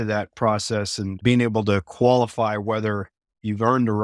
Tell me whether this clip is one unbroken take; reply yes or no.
no